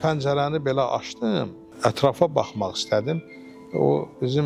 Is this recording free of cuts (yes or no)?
yes